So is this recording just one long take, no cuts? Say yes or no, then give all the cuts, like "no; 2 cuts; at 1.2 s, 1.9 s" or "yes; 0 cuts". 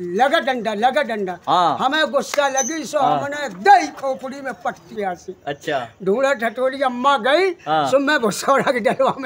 no; 1 cut; at 4.9 s